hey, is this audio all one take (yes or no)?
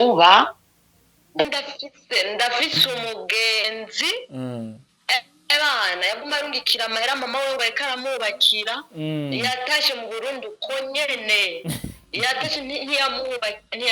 no